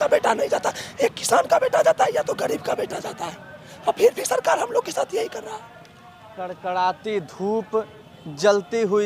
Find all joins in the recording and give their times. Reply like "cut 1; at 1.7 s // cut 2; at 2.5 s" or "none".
none